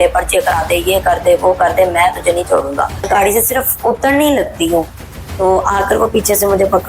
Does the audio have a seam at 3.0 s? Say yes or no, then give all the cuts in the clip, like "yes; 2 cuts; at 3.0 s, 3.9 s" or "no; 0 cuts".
yes; 1 cut; at 3.0 s